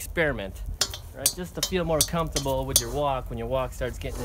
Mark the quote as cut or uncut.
uncut